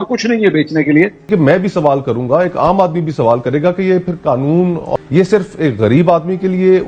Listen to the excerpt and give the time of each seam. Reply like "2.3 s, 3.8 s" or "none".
1.2 s, 4.9 s